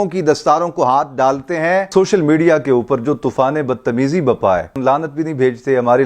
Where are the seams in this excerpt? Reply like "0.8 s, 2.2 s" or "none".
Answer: 1.9 s, 4.8 s